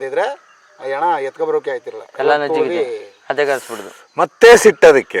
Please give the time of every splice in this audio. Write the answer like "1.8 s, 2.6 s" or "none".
none